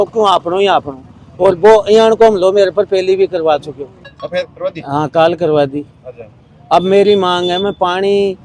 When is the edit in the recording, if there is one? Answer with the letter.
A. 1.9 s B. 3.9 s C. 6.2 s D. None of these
D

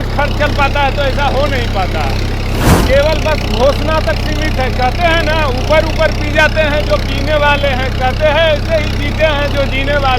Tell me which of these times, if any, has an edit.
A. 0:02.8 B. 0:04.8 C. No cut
A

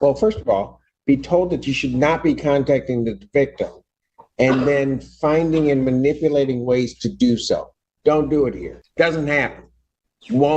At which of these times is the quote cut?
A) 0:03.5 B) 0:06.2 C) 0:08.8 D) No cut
C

